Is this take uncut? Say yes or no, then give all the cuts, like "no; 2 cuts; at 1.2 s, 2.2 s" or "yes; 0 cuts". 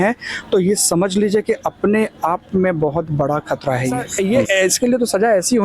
no; 1 cut; at 4.1 s